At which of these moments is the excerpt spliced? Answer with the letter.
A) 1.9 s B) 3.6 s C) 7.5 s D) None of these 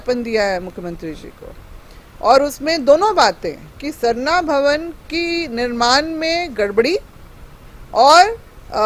D